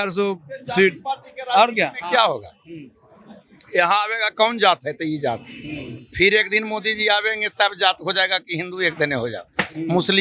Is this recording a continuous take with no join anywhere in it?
yes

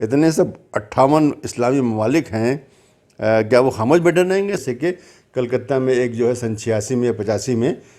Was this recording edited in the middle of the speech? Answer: yes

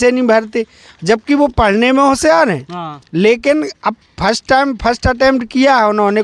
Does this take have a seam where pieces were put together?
no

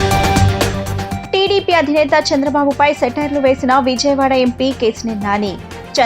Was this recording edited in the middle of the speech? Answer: yes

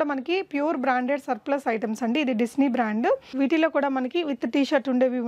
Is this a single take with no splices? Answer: no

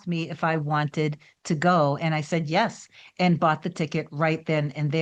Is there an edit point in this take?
no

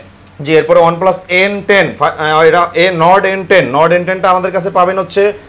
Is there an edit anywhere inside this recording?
no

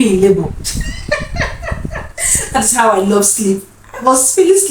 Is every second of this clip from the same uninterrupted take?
yes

